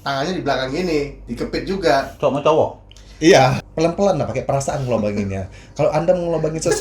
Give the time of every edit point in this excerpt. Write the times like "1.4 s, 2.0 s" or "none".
3.6 s